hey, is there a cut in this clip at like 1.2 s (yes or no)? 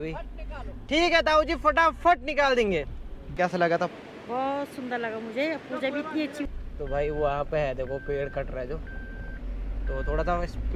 no